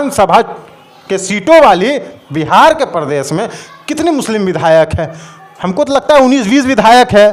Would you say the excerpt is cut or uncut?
uncut